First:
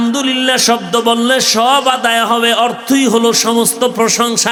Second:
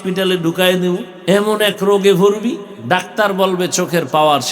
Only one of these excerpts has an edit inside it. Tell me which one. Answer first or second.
second